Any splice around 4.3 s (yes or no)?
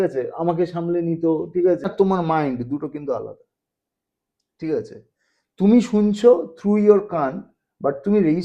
no